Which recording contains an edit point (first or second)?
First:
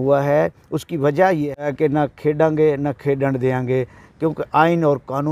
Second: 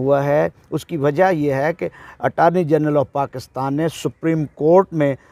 first